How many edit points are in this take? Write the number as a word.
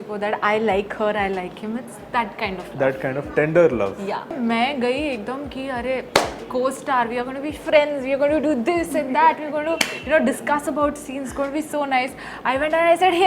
one